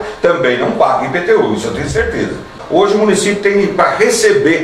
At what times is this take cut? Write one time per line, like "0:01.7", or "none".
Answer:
0:02.6